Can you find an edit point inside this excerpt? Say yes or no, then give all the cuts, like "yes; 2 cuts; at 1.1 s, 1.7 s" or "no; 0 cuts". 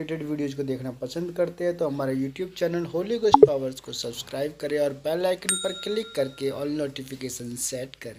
no; 0 cuts